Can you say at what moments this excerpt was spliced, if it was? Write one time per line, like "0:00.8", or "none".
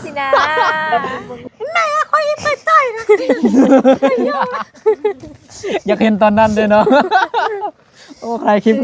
0:01.3